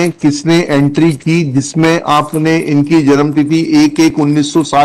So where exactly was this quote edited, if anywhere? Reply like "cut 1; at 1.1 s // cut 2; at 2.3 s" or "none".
none